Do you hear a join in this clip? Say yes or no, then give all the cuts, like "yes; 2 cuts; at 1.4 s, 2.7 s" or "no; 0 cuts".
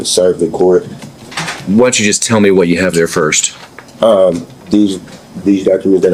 no; 0 cuts